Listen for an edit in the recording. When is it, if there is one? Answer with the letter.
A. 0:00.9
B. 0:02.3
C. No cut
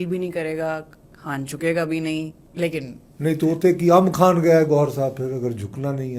C